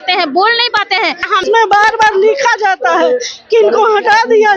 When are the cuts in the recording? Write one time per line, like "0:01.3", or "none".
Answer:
0:01.4